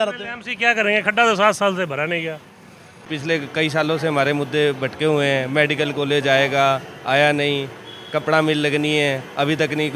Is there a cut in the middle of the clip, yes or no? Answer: yes